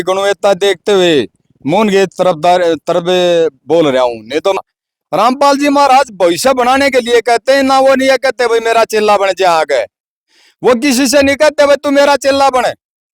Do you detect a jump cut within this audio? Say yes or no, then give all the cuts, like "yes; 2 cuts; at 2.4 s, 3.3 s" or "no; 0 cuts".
yes; 1 cut; at 4.6 s